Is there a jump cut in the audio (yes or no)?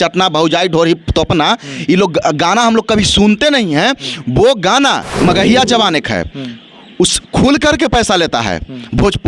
yes